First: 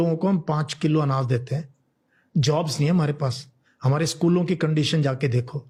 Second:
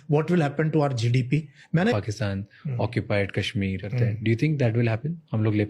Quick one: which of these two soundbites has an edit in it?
second; 2 cuts; at 1.9 s, 3.8 s

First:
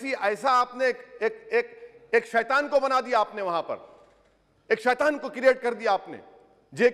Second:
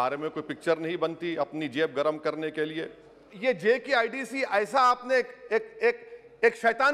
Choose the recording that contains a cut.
second; 1 cut; at 3.3 s

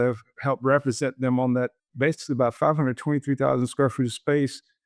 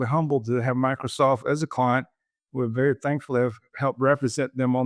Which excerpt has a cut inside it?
first; 1 cut; at 2.5 s

